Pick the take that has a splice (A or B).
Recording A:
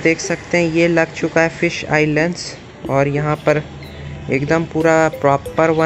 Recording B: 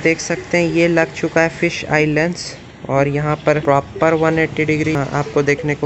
B